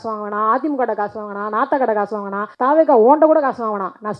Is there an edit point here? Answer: yes; 1 cut; at 2.4 s

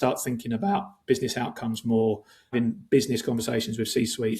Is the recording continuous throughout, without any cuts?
no; 1 cut; at 2.5 s

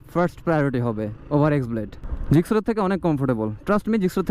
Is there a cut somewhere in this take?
yes; 1 cut; at 1.9 s

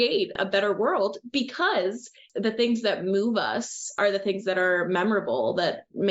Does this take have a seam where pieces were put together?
yes; 2 cuts; at 2.3 s, 4.0 s

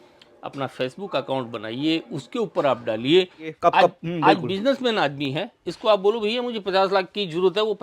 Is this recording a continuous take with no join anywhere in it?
no; 1 cut; at 3.5 s

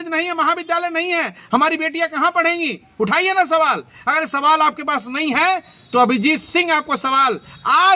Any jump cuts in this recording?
no; 0 cuts

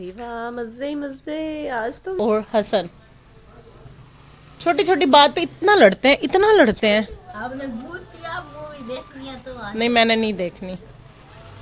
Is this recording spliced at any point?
yes; 1 cut; at 2.1 s

